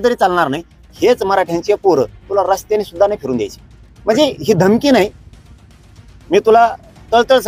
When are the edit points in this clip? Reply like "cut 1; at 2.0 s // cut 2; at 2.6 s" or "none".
cut 1; at 0.9 s